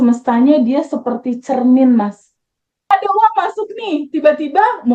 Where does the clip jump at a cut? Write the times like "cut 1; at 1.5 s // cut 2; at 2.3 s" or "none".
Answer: cut 1; at 2.7 s